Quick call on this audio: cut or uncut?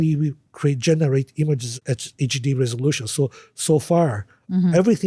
uncut